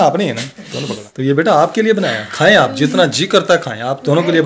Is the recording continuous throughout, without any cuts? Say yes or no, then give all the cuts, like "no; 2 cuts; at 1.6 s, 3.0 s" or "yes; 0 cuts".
no; 1 cut; at 1.0 s